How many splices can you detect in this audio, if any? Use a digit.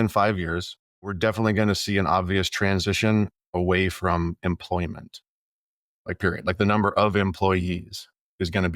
1